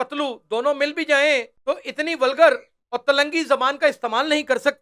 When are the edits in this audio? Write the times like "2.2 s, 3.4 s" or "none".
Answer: 1.5 s